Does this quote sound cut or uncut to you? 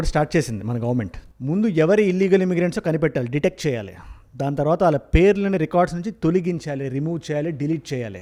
uncut